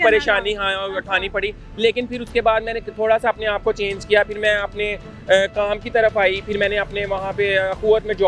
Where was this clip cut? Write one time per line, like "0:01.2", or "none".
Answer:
none